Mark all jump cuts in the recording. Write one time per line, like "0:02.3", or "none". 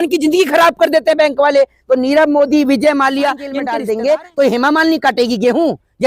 0:03.6